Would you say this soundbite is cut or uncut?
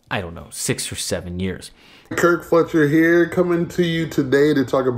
cut